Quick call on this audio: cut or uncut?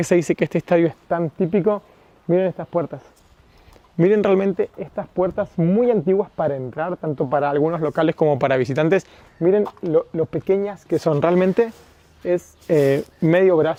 uncut